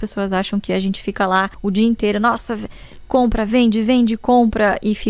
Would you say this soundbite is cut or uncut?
cut